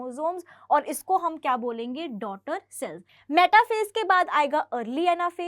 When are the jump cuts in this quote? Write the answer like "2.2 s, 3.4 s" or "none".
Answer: 3.1 s